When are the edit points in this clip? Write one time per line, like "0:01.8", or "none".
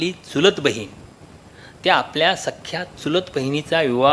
none

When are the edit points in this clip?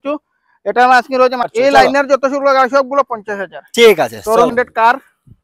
0:01.5
0:04.5

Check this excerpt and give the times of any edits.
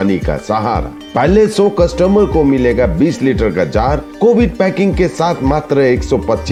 none

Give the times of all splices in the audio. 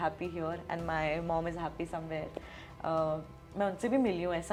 none

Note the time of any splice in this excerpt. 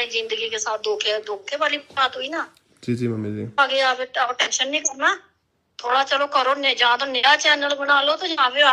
none

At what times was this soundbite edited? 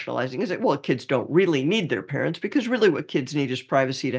none

